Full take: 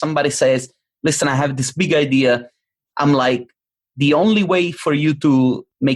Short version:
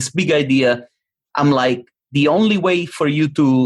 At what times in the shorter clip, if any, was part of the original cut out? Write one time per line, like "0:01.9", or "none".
0:01.9